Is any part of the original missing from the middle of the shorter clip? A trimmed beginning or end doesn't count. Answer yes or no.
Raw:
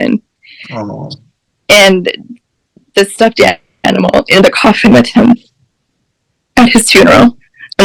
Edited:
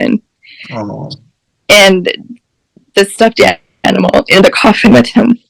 no